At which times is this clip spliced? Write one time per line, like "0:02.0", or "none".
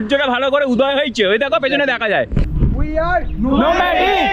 0:02.5